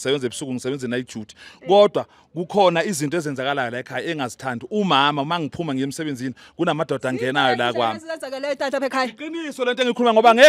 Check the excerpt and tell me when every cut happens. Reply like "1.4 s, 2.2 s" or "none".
none